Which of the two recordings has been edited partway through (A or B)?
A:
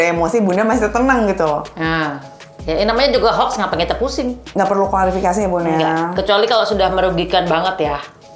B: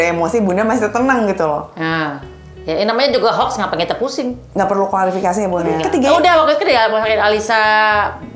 B